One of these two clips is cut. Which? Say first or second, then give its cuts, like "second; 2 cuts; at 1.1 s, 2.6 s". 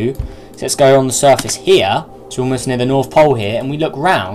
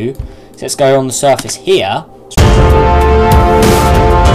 first; 1 cut; at 2.3 s